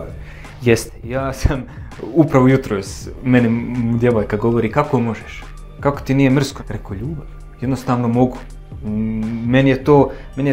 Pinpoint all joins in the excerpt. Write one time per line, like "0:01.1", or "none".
0:06.6

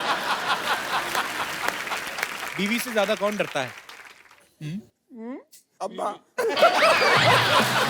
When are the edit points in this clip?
0:02.5

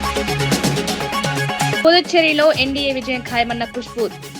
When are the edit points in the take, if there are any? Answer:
0:01.8

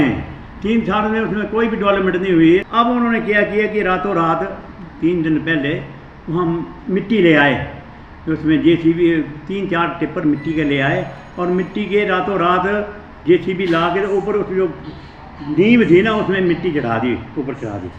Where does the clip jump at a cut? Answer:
0:02.7

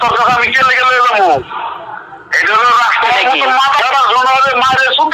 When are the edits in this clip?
none

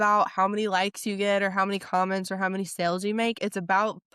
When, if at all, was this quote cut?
none

